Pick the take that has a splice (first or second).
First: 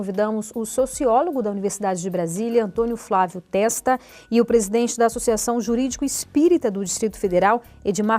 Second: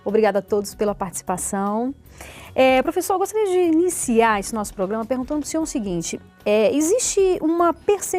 first